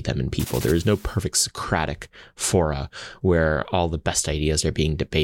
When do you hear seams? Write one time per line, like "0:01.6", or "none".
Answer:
none

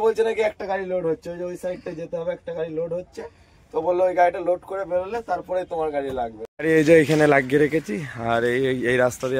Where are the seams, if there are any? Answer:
0:06.4

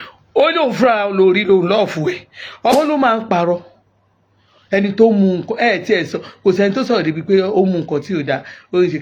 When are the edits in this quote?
0:02.7

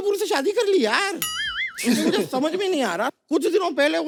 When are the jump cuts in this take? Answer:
none

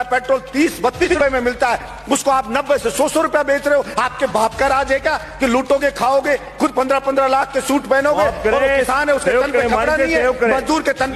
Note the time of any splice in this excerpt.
0:01.0

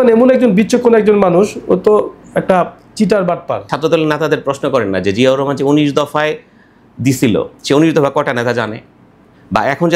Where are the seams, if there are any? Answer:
0:03.6

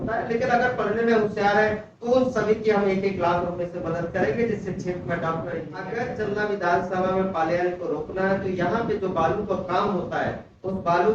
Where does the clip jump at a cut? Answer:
0:05.8

